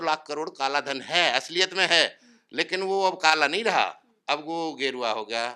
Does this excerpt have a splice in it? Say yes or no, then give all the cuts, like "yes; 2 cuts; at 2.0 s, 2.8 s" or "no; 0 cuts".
no; 0 cuts